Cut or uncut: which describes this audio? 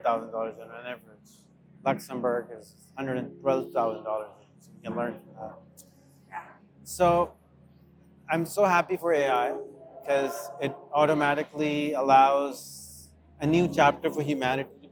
uncut